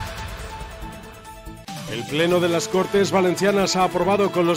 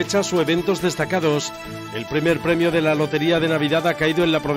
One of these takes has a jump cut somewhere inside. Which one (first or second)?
first